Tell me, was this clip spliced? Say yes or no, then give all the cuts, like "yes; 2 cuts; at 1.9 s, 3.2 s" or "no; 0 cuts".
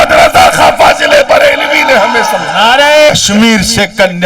yes; 1 cut; at 3.1 s